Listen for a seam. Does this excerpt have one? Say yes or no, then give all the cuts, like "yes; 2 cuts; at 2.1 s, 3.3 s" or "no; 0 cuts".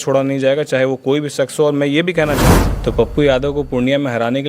yes; 1 cut; at 2.5 s